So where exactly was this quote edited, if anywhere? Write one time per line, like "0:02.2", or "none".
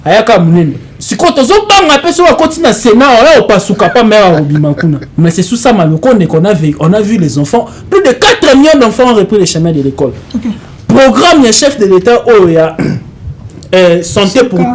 0:05.1